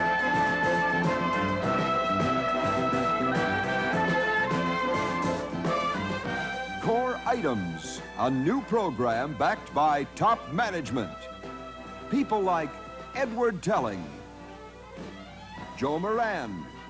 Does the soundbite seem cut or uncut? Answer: uncut